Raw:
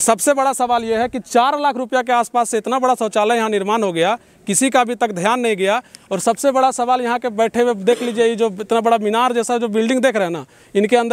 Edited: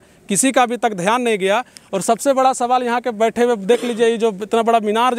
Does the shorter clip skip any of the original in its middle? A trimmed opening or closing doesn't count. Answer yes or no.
no